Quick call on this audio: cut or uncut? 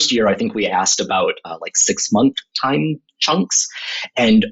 uncut